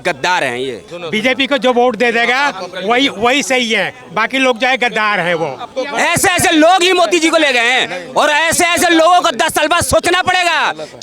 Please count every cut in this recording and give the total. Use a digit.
2